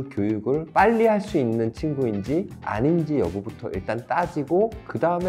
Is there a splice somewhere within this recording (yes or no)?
no